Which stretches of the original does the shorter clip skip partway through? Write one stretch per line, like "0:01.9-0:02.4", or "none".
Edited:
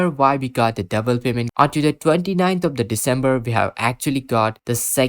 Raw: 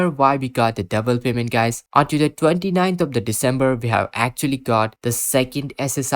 0:01.4-0:01.8